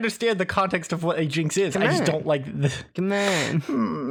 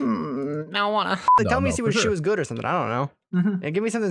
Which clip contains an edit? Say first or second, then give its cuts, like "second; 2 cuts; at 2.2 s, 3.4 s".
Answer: second; 2 cuts; at 1.4 s, 3.2 s